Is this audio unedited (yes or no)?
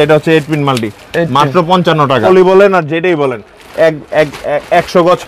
no